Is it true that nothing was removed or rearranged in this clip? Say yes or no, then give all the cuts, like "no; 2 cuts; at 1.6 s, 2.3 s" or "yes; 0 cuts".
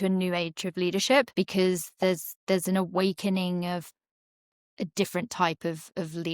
no; 1 cut; at 1.3 s